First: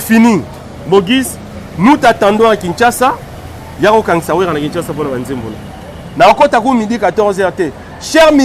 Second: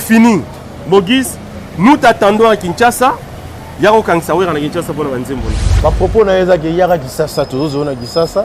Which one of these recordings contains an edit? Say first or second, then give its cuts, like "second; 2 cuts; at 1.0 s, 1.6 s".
second; 1 cut; at 5.7 s